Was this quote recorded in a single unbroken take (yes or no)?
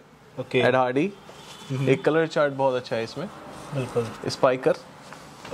yes